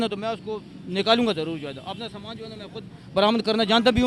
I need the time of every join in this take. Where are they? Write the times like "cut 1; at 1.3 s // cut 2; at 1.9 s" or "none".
none